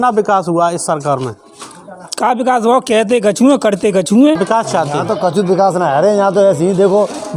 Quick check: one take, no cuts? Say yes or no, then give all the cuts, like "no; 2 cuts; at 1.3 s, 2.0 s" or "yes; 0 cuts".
no; 1 cut; at 4.4 s